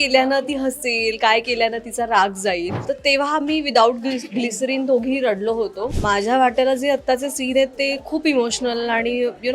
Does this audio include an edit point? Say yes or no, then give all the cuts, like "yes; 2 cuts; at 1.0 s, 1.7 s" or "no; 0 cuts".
yes; 2 cuts; at 2.8 s, 5.9 s